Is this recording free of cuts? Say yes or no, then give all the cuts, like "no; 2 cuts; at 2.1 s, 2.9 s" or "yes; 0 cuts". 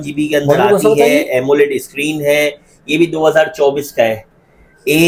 yes; 0 cuts